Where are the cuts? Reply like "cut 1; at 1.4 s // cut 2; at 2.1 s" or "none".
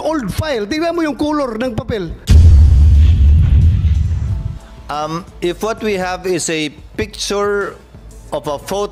cut 1; at 2.2 s // cut 2; at 4.4 s